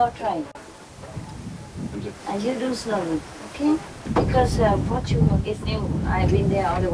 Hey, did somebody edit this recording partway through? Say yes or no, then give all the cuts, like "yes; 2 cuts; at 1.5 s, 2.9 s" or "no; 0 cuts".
yes; 1 cut; at 1.9 s